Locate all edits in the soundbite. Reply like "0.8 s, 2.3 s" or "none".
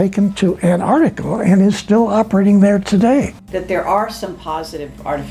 3.4 s